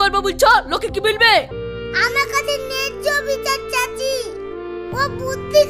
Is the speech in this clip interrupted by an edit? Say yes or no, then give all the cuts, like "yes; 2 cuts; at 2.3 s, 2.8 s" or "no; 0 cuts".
yes; 1 cut; at 1.5 s